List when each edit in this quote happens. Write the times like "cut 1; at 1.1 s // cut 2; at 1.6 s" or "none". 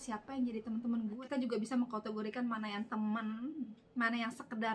cut 1; at 1.2 s